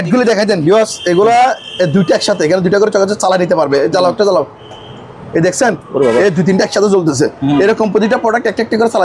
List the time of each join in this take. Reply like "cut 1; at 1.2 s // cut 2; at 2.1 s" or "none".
none